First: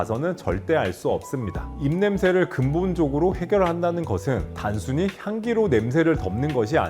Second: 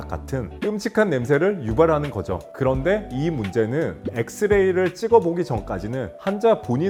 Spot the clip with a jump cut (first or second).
first